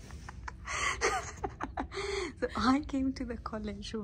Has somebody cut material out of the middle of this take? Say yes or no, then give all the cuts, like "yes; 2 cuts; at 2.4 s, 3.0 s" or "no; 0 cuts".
no; 0 cuts